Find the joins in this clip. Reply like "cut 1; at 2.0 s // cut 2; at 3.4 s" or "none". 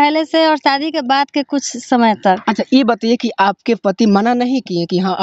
none